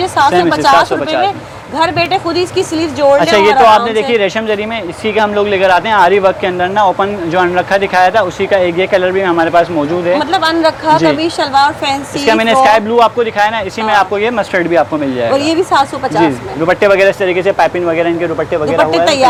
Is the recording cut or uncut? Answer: uncut